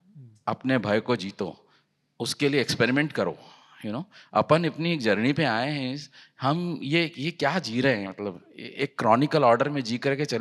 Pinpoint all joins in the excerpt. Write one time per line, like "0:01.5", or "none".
none